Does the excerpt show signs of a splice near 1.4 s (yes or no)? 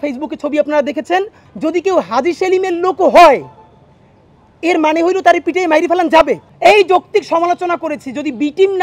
yes